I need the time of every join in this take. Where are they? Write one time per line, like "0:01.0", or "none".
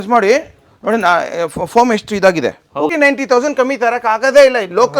0:02.9